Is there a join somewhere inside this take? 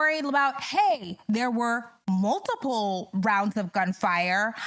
no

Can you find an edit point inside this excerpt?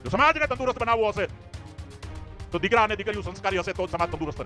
no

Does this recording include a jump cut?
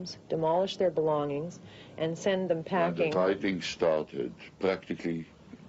yes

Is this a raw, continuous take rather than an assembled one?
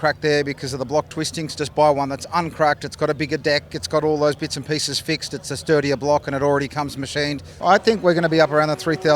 no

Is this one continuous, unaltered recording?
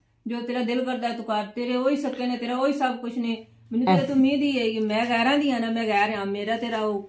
yes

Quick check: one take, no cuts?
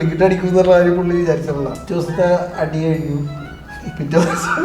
no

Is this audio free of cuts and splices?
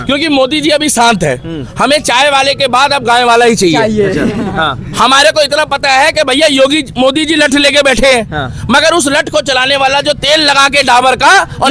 yes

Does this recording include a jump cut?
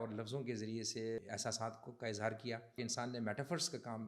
yes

